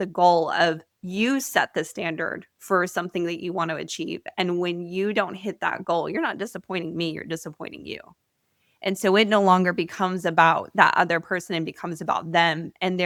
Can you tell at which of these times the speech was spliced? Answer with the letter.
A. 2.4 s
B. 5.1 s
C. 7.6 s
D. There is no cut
D